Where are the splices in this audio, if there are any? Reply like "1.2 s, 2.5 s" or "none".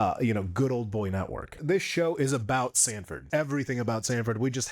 1.6 s, 3.2 s